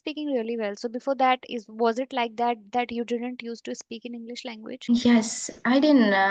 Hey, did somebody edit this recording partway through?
no; 0 cuts

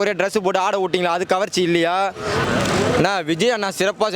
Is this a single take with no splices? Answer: no; 1 cut; at 2.4 s

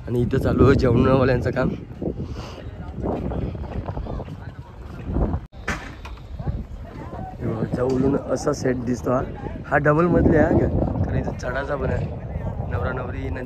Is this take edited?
no; 0 cuts

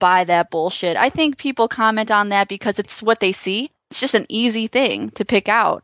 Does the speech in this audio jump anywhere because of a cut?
yes; 2 cuts; at 3.0 s, 4.0 s

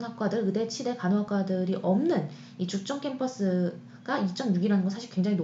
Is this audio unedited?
yes; 0 cuts

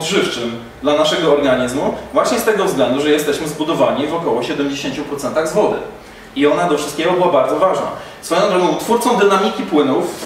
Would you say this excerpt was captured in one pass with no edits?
yes; 0 cuts

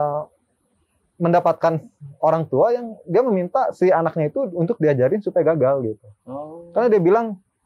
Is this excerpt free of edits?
yes; 0 cuts

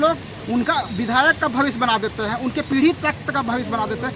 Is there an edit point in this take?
no; 0 cuts

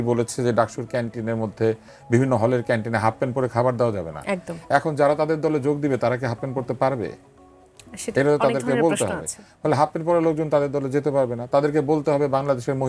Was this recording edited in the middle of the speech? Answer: no; 0 cuts

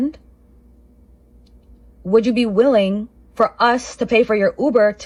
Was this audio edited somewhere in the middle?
no; 0 cuts

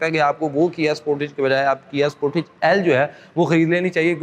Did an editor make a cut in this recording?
no; 0 cuts

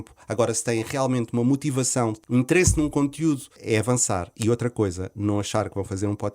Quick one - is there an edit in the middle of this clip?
yes; 2 cuts; at 2.2 s, 3.5 s

